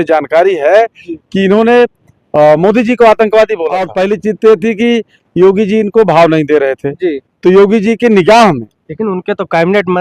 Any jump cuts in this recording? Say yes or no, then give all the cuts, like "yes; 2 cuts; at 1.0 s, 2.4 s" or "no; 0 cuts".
yes; 1 cut; at 3.9 s